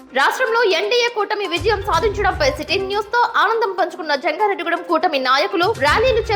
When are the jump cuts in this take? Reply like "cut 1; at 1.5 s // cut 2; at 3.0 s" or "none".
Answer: none

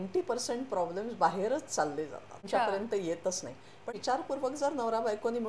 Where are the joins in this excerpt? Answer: cut 1; at 2.4 s // cut 2; at 3.8 s

